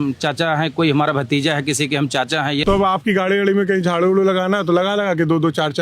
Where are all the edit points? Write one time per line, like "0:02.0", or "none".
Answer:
0:02.6